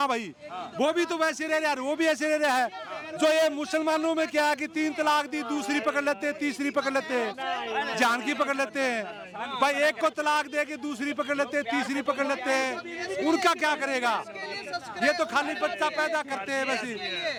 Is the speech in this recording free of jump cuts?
yes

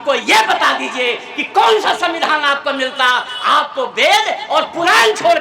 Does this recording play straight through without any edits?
yes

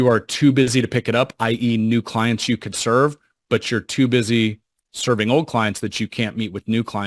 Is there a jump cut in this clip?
no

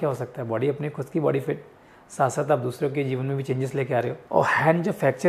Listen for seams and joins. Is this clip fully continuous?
no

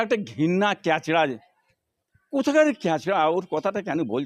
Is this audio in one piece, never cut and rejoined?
yes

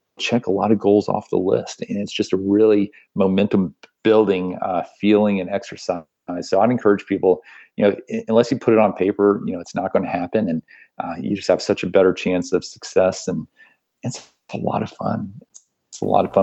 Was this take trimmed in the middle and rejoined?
no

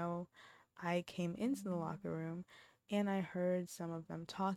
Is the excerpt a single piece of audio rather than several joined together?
yes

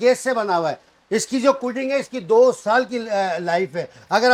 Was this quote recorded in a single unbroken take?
yes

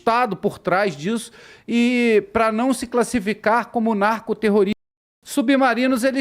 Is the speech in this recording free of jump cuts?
no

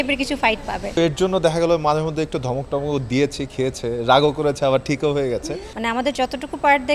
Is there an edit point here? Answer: yes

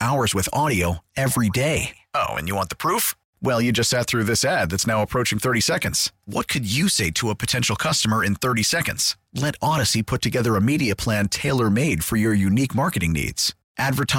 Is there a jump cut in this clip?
no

